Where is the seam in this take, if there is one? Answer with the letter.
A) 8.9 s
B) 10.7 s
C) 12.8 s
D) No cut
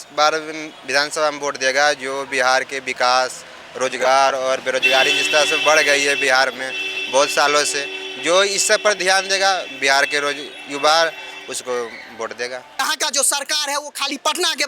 C